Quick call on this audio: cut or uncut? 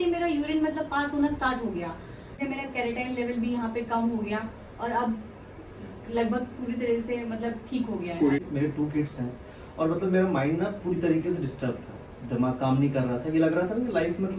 cut